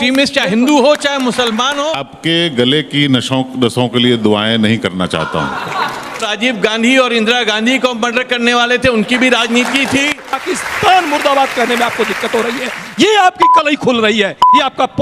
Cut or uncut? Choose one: cut